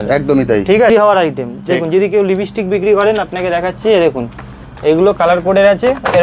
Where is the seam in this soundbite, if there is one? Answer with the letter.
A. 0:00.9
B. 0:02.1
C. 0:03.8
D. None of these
A